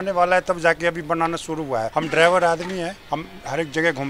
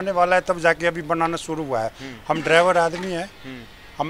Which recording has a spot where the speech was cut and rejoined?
first; 2 cuts; at 1.9 s, 3.0 s

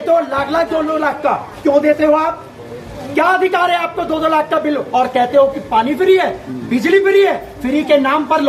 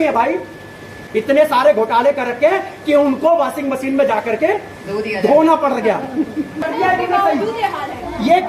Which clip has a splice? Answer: second; 2 cuts; at 1.0 s, 6.6 s

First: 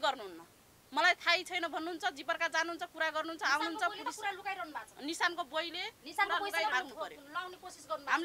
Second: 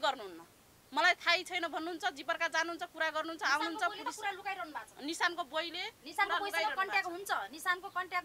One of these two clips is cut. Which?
first; 1 cut; at 6.7 s

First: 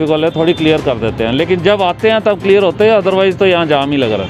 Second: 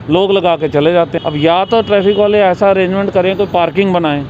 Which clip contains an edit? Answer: second; 1 cut; at 1.1 s

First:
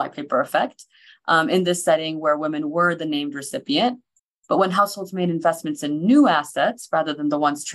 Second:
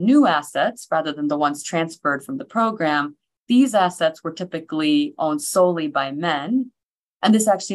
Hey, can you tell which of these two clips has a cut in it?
second; 1 cut; at 6.8 s

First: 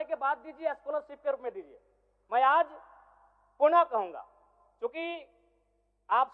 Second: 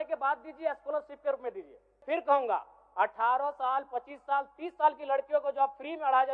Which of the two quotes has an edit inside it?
second; 1 cut; at 2.0 s

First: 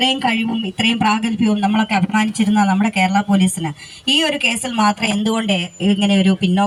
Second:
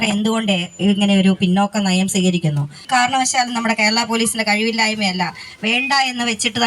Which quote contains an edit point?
second; 1 cut; at 2.8 s

